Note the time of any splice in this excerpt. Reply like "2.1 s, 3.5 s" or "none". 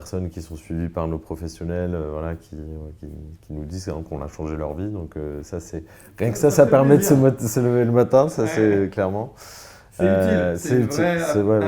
none